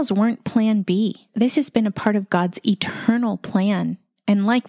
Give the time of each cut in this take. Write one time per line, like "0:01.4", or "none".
0:01.2